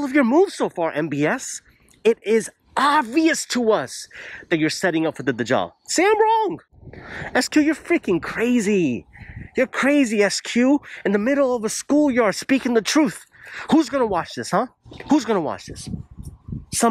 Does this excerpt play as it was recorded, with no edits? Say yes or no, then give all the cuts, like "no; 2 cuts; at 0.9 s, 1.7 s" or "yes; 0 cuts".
yes; 0 cuts